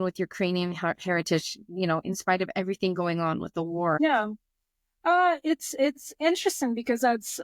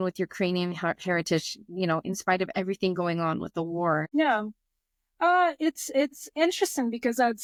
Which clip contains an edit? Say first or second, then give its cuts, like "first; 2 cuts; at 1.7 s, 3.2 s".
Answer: first; 1 cut; at 4.0 s